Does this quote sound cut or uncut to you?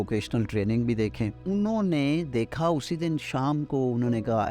cut